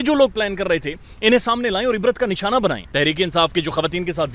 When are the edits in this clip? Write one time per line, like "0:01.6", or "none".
0:02.8